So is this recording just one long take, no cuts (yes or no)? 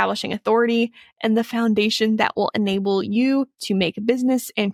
yes